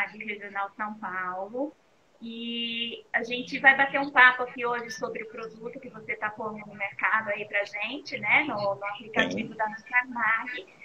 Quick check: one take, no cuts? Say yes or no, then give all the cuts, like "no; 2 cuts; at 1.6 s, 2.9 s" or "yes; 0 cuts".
no; 1 cut; at 2.8 s